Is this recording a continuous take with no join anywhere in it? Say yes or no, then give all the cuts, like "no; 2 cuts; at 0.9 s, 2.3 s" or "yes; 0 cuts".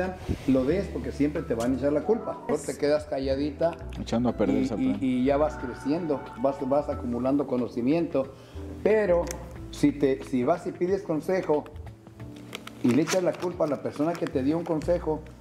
no; 1 cut; at 2.5 s